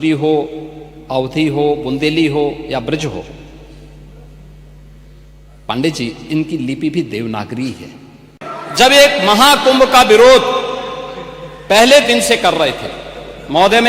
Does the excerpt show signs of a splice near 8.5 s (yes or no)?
yes